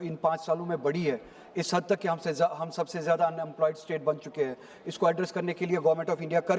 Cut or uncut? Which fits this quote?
uncut